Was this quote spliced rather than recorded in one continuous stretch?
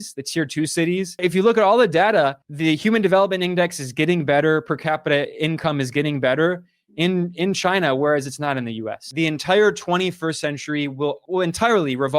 yes; 2 cuts; at 1.2 s, 9.1 s

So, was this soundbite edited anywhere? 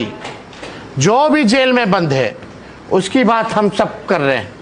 no; 0 cuts

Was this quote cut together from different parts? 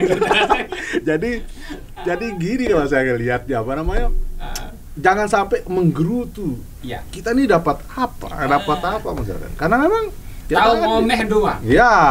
no; 0 cuts

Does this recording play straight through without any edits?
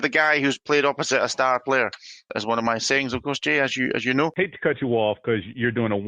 no; 2 cuts; at 2.3 s, 4.3 s

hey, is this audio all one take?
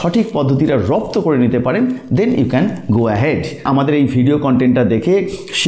no; 1 cut; at 3.6 s

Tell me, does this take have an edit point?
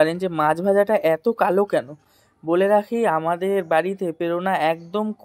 no; 0 cuts

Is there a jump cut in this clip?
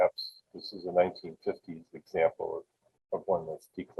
no; 0 cuts

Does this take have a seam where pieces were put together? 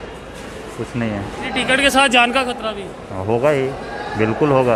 no; 0 cuts

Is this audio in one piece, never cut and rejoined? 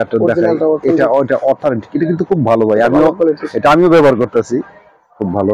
yes; 0 cuts

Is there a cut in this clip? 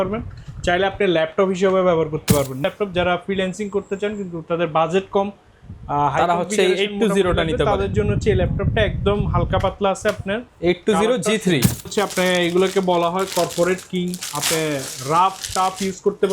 yes; 2 cuts; at 2.6 s, 11.9 s

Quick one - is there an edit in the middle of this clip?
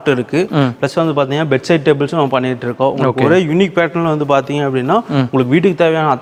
no; 0 cuts

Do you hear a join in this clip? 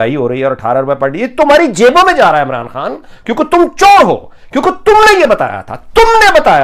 no; 0 cuts

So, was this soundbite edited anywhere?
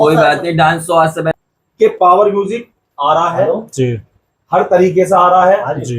yes; 1 cut; at 1.4 s

